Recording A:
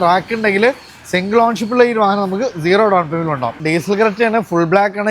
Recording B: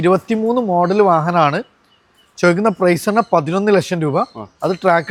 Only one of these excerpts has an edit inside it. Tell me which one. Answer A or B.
A